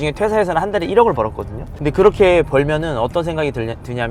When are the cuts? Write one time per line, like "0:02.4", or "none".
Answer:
none